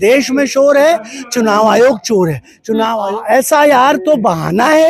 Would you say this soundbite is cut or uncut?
cut